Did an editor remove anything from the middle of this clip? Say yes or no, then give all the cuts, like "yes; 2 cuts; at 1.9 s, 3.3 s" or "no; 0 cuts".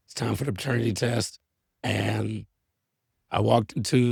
no; 0 cuts